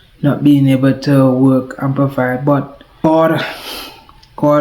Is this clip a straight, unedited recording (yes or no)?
no